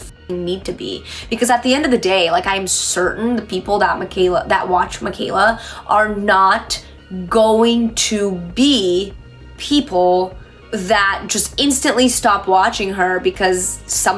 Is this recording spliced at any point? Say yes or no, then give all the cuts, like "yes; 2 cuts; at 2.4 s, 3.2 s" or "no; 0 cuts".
no; 0 cuts